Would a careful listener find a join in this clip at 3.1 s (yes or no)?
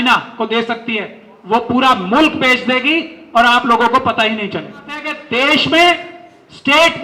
no